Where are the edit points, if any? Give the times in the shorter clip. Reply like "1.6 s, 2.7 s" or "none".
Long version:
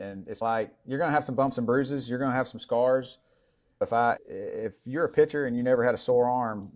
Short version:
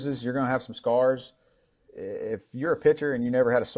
1.9 s